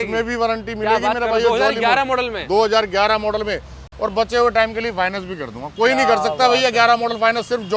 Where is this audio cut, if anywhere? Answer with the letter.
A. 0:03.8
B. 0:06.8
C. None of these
C